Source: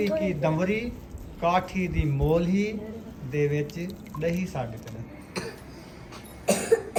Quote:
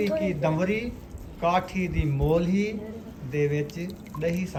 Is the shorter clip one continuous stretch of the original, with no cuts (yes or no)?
yes